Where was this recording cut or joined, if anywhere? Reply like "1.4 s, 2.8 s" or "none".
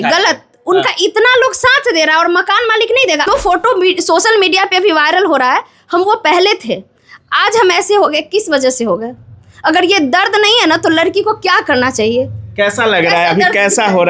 3.2 s